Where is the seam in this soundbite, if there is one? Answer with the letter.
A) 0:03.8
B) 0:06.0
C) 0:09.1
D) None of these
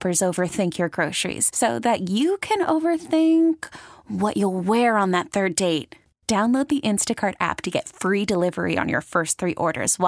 D